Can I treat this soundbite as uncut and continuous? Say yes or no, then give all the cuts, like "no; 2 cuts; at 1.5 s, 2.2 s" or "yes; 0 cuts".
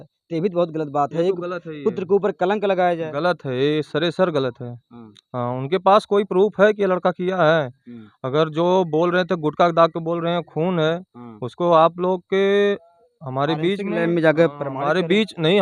yes; 0 cuts